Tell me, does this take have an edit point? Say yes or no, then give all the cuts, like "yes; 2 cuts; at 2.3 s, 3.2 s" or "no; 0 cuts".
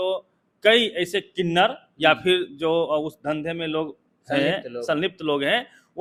no; 0 cuts